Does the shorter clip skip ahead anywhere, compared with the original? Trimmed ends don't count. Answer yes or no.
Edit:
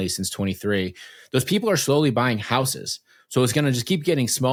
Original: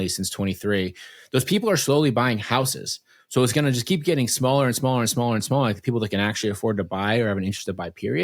no